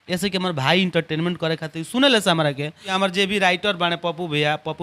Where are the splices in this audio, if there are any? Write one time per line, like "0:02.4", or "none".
0:02.9